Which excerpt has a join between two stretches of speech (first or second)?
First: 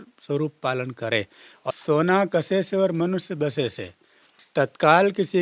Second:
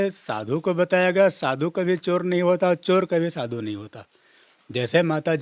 first